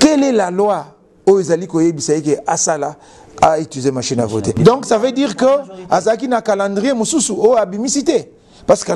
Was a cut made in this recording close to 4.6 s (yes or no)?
yes